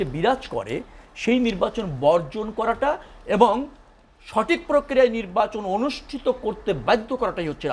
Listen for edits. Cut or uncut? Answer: uncut